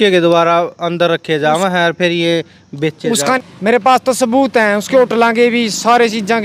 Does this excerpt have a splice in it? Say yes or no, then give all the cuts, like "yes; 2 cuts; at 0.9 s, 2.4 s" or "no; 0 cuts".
no; 0 cuts